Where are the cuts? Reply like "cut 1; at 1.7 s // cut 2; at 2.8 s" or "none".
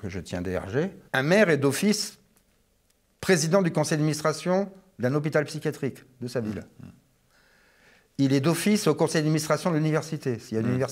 cut 1; at 1.0 s